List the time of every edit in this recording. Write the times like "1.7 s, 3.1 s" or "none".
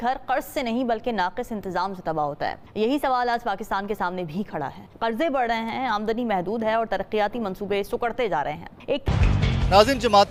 none